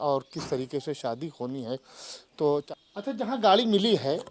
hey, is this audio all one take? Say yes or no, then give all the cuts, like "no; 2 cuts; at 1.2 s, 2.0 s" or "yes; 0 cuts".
no; 1 cut; at 2.7 s